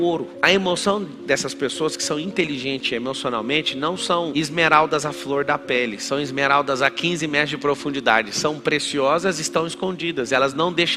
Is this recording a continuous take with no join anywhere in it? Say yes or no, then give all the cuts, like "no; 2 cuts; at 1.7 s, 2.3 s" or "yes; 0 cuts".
yes; 0 cuts